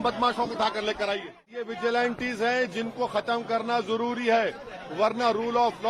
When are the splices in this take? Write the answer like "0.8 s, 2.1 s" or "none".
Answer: 1.6 s